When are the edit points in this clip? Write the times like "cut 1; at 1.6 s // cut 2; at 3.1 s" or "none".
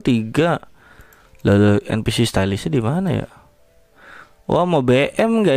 none